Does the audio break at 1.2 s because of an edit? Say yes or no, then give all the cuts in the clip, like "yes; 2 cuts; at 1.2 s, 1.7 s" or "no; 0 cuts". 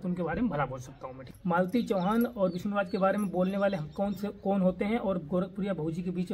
yes; 1 cut; at 1.2 s